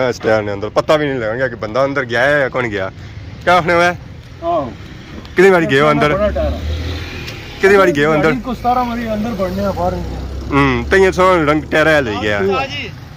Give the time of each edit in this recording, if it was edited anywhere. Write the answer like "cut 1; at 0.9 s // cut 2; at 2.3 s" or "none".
none